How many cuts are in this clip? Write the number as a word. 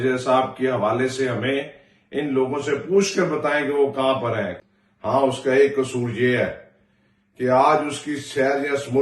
one